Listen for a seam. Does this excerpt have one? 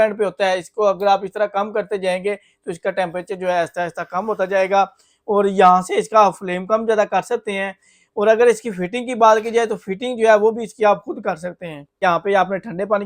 yes; 1 cut; at 12.0 s

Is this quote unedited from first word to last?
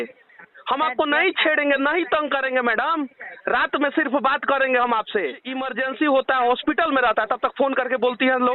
no; 1 cut; at 5.8 s

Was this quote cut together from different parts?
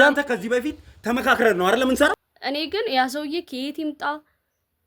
yes; 1 cut; at 2.3 s

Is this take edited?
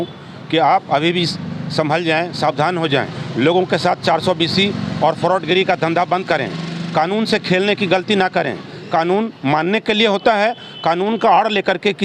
no; 0 cuts

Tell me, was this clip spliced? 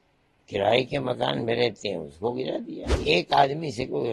yes; 1 cut; at 2.9 s

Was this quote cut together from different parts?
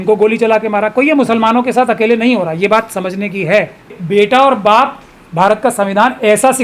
yes; 1 cut; at 4.0 s

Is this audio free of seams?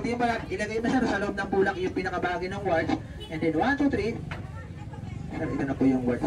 yes; 0 cuts

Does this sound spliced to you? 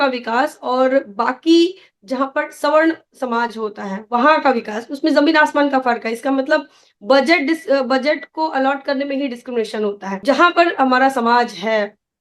yes; 1 cut; at 10.1 s

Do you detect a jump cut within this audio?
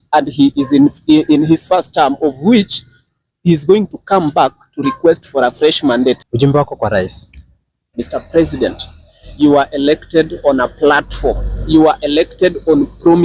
yes; 2 cuts; at 6.3 s, 7.9 s

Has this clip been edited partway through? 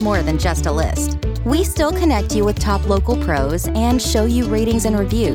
no; 0 cuts

